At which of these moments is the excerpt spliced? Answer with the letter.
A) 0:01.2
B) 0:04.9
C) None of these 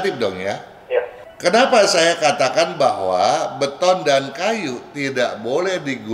A